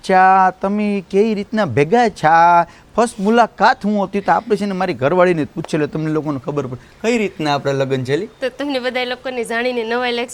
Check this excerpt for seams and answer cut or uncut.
uncut